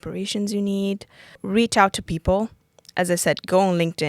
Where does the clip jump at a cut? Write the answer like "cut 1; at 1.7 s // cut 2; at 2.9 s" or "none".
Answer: cut 1; at 1.4 s